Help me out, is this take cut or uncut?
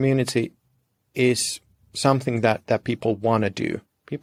uncut